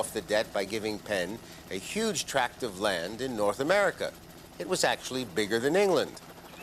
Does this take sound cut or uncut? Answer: cut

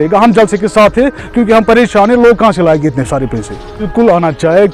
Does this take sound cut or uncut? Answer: uncut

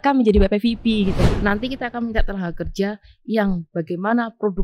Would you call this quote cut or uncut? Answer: cut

